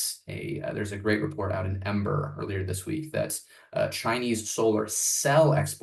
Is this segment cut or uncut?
uncut